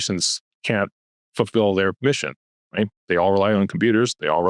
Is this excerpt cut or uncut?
uncut